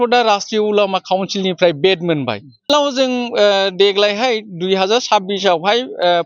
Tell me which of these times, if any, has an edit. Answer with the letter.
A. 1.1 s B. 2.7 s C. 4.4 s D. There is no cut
B